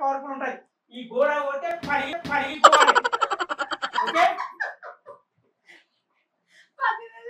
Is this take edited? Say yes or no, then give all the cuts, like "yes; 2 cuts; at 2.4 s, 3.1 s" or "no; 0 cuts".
no; 0 cuts